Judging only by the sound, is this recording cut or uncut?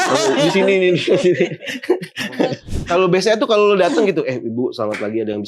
cut